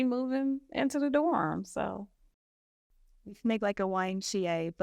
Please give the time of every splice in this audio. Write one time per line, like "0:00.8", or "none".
0:02.4